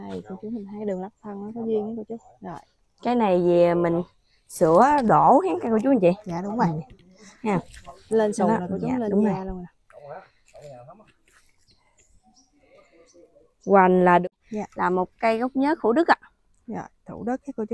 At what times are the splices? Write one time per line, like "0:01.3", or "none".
0:14.2

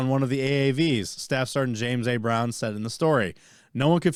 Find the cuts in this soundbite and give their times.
none

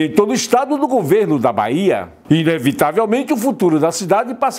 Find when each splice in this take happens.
0:02.1

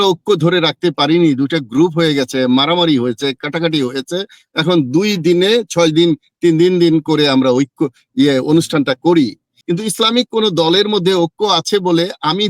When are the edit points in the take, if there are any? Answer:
0:09.5

